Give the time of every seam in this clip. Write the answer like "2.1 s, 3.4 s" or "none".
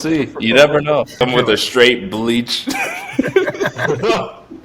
1.1 s